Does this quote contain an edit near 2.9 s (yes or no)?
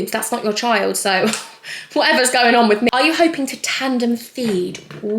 yes